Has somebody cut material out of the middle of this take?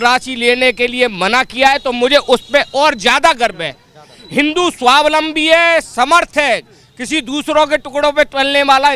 no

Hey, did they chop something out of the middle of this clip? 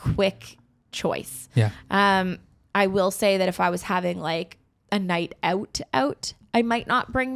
no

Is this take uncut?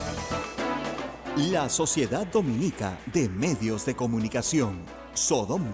no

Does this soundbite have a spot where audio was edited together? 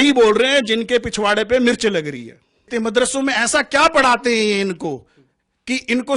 yes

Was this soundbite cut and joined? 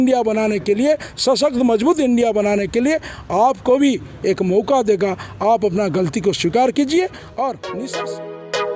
yes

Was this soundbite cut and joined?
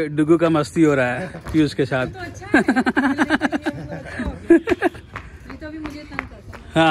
no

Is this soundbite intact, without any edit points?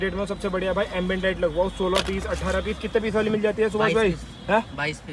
yes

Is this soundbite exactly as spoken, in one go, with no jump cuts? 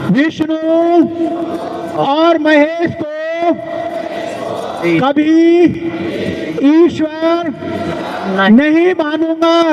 yes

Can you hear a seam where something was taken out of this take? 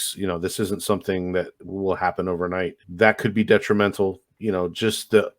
yes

